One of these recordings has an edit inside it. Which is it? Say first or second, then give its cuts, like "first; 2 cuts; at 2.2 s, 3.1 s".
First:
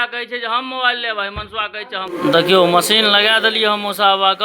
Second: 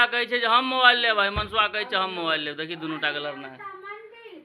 first; 1 cut; at 2.1 s